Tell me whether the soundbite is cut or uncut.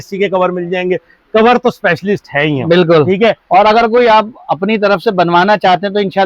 uncut